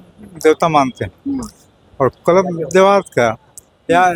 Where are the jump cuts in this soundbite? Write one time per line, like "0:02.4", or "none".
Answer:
none